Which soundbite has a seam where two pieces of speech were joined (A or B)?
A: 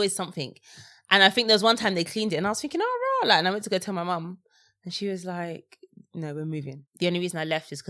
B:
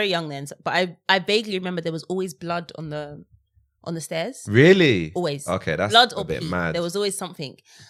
A